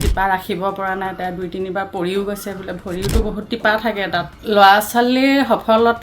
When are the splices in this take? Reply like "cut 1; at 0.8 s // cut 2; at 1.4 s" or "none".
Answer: cut 1; at 4.3 s